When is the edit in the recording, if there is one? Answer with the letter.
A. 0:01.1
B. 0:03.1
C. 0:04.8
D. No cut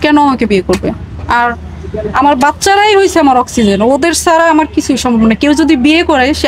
D